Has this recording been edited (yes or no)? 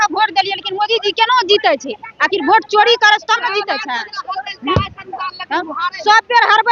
no